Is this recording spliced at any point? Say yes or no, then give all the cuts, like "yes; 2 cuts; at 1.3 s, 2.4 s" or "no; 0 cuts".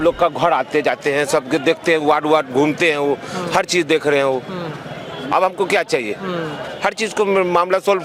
no; 0 cuts